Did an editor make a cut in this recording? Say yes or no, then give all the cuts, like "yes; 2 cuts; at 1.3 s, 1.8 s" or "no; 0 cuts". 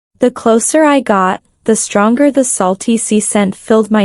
yes; 1 cut; at 1.5 s